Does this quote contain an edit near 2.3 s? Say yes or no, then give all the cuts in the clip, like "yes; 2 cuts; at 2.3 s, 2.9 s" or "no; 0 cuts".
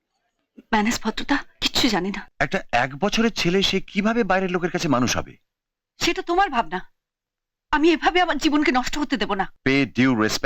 yes; 2 cuts; at 2.3 s, 9.5 s